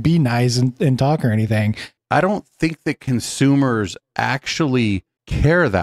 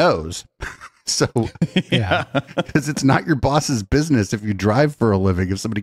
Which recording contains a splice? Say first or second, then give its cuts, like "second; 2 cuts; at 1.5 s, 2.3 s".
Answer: first; 1 cut; at 1.9 s